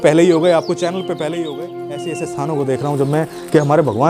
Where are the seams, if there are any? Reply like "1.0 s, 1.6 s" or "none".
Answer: 1.8 s